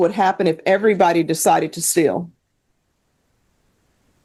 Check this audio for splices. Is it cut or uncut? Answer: uncut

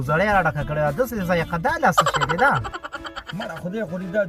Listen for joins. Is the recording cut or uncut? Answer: uncut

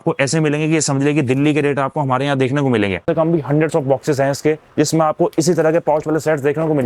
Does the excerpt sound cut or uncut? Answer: cut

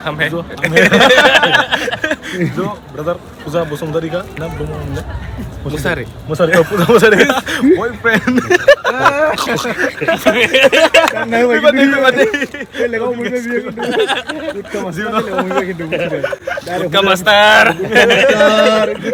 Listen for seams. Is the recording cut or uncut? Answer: uncut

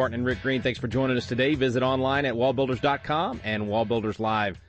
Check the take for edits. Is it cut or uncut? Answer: uncut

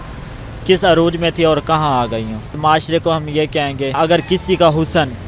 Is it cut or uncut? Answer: cut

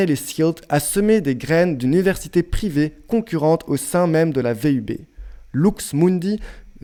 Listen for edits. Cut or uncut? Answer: uncut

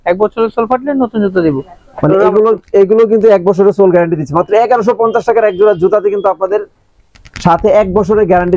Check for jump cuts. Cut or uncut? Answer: uncut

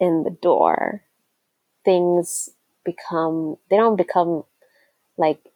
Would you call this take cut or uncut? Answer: uncut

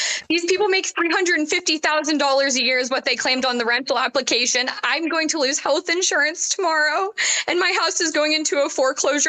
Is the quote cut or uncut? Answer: uncut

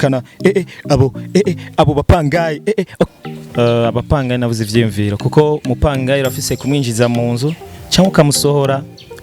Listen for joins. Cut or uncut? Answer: cut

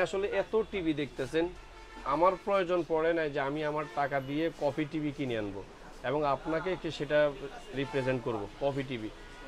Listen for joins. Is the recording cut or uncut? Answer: uncut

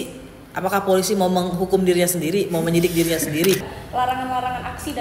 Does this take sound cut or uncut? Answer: cut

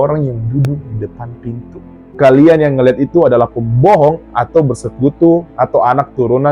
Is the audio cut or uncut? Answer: cut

